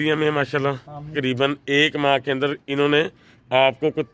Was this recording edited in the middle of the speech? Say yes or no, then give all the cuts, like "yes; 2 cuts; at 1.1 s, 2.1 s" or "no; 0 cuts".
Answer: yes; 1 cut; at 1.1 s